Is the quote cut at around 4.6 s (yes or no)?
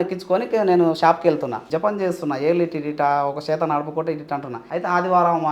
yes